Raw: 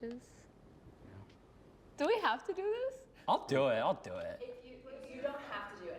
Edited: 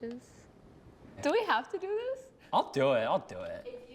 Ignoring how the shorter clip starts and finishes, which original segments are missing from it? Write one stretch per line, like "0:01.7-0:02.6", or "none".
0:01.0-0:01.8